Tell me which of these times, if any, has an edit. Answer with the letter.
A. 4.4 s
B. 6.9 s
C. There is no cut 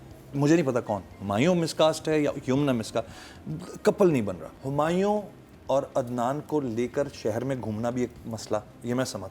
A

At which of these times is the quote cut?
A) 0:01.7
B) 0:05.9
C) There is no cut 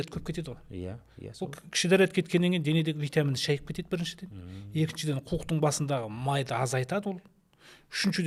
C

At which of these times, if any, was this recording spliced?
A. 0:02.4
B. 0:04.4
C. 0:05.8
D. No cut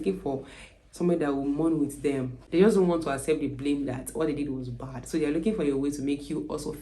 A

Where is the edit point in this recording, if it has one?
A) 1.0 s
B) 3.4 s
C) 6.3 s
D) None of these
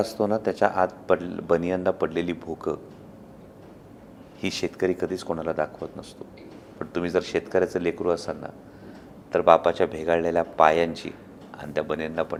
D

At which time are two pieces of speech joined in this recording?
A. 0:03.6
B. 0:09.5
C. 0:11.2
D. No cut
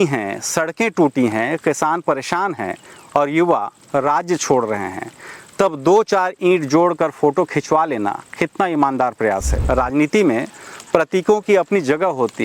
B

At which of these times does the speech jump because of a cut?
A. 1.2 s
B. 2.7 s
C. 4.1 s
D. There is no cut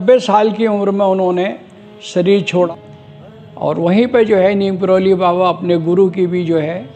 B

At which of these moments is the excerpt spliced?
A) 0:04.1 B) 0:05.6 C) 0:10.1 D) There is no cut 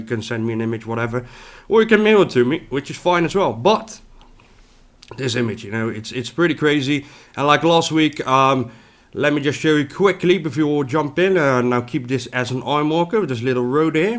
D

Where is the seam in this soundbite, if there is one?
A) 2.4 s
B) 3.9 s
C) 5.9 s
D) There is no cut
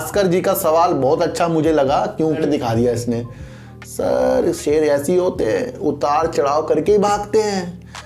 A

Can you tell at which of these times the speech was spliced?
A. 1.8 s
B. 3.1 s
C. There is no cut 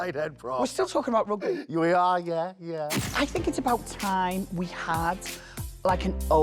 B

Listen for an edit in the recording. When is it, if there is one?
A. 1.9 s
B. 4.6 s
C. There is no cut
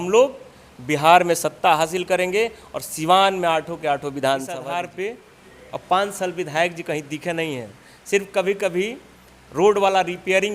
B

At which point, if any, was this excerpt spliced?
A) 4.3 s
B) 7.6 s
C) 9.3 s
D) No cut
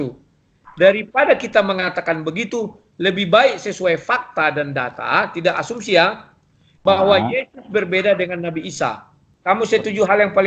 C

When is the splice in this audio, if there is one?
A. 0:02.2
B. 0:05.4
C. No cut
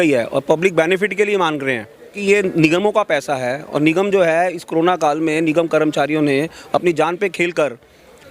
A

